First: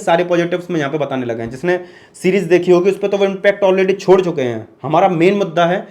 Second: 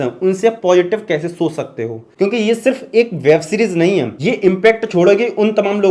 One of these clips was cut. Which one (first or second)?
second